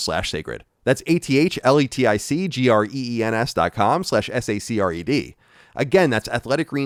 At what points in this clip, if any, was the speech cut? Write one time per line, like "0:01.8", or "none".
none